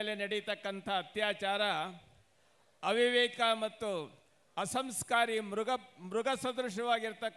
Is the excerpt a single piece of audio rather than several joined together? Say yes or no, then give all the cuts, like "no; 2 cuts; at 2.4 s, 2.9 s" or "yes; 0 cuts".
yes; 0 cuts